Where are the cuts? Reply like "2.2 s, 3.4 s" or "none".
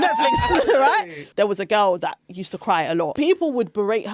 1.2 s, 3.1 s

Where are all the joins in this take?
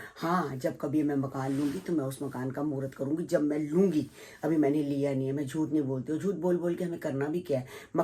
none

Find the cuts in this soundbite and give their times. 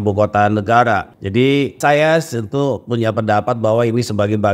1.6 s

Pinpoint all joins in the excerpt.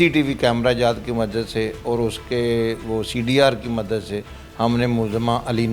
none

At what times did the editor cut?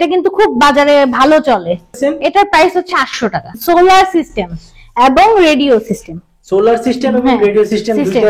1.9 s, 3.6 s

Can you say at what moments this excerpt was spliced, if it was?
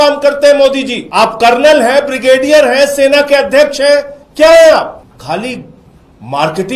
1.0 s, 5.1 s

